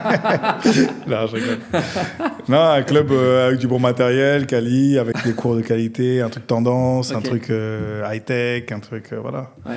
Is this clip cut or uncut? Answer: cut